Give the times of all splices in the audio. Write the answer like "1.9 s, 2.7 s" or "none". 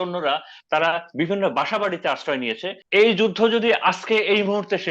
2.7 s